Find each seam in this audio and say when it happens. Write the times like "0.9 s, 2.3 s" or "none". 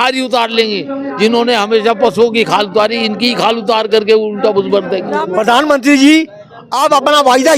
5.0 s